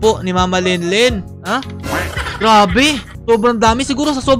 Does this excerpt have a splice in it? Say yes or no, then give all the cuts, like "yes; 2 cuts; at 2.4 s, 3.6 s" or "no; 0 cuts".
no; 0 cuts